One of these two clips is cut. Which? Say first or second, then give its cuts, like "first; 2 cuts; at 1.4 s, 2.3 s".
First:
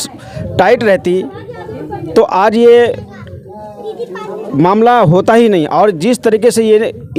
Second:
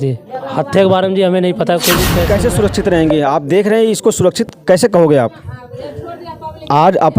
second; 1 cut; at 2.2 s